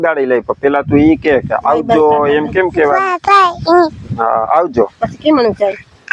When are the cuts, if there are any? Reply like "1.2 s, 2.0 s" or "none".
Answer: none